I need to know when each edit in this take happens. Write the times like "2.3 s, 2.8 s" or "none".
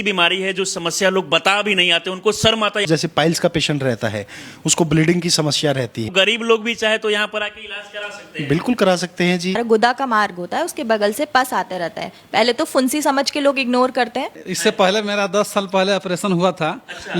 2.9 s, 6.1 s, 9.6 s, 14.4 s